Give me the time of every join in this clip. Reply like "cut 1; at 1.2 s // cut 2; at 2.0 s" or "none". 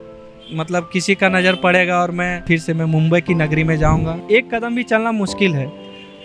cut 1; at 2.4 s // cut 2; at 4.2 s